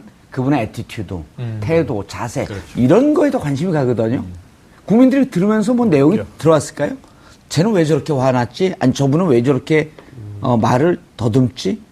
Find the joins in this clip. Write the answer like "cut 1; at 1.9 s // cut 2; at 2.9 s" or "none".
cut 1; at 1.8 s